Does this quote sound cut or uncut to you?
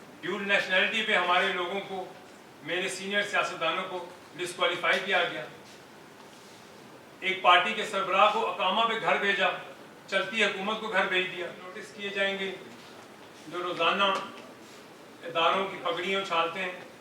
cut